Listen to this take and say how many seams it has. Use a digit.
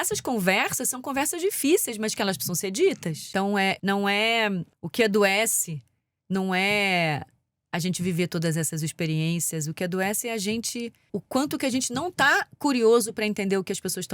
1